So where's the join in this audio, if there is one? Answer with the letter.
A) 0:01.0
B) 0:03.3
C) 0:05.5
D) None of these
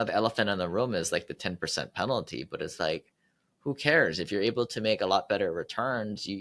D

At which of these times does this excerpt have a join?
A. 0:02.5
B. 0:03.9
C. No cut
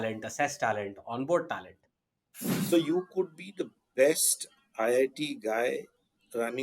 A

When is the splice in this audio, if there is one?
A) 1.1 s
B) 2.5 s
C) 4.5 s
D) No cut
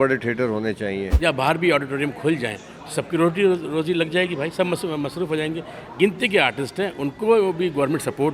A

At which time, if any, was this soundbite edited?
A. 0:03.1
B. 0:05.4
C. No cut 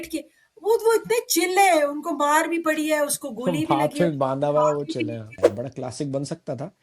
B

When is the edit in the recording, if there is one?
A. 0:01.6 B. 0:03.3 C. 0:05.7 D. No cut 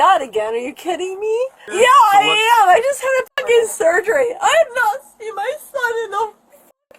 A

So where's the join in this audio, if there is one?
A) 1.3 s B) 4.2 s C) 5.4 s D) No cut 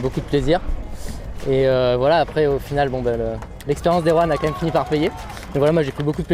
C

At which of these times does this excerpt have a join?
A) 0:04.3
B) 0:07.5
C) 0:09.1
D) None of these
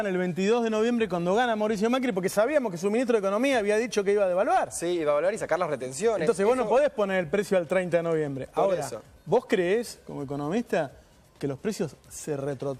D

